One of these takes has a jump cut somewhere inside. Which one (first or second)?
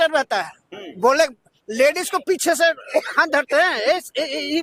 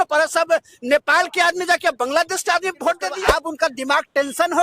second